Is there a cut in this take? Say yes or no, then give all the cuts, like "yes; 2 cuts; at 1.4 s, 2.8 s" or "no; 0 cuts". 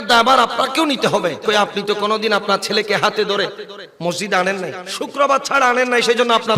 yes; 2 cuts; at 1.4 s, 4.8 s